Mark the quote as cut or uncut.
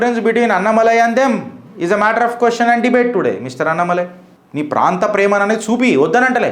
cut